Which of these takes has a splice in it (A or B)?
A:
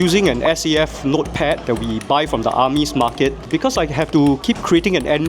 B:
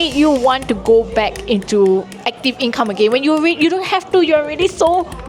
A